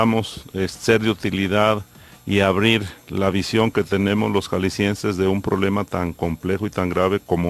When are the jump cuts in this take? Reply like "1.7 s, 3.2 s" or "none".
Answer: 1.7 s